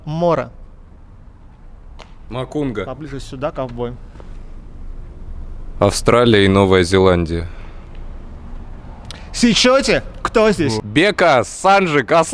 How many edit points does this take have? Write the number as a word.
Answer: one